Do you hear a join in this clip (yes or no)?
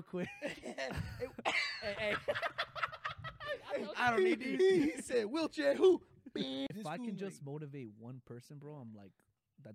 yes